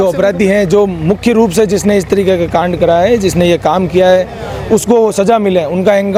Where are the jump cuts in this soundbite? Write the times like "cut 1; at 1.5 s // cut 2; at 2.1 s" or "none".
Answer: none